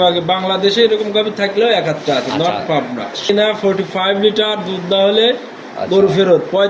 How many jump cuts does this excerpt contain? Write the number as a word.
one